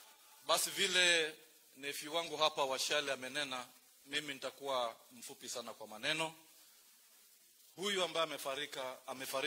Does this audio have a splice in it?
no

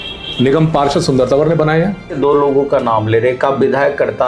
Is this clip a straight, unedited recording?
no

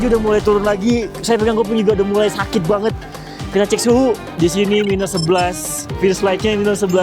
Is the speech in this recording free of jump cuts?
no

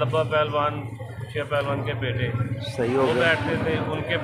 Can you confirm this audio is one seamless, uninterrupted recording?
yes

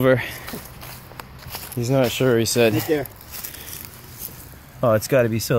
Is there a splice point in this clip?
no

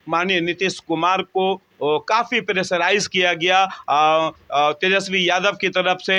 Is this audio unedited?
yes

